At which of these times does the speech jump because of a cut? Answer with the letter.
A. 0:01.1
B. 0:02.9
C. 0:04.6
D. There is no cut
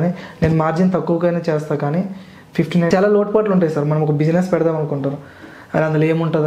B